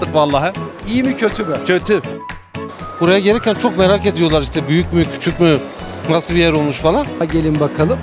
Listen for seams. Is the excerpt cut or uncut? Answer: cut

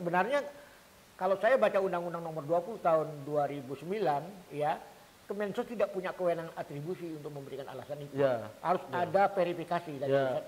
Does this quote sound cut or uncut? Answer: uncut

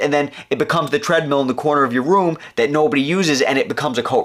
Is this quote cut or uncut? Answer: uncut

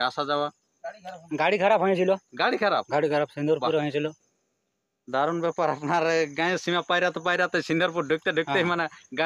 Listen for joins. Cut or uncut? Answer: uncut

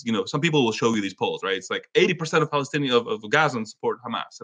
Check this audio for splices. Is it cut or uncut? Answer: uncut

